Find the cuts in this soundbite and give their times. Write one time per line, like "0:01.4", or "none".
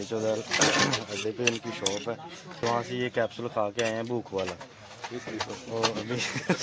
0:02.6